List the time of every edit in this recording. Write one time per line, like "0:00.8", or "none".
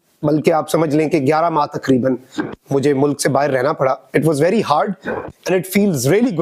none